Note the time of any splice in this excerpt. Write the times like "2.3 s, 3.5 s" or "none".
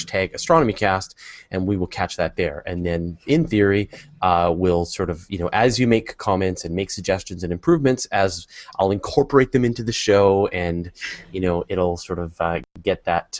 1.5 s